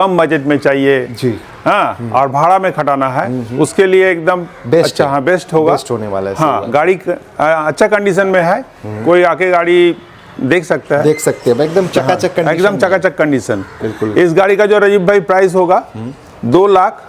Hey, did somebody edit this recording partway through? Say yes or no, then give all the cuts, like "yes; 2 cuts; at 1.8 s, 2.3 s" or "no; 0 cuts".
no; 0 cuts